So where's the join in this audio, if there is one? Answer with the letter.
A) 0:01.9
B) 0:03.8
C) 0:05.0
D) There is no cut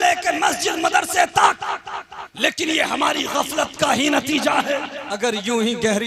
C